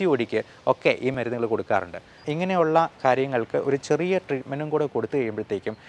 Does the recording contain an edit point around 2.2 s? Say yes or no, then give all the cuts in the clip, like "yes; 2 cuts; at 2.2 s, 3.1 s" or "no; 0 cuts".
yes; 2 cuts; at 1.1 s, 2.2 s